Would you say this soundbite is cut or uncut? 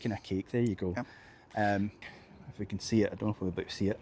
cut